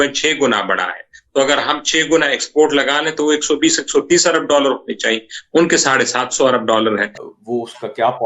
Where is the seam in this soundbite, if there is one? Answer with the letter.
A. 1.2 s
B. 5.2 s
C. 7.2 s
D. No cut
C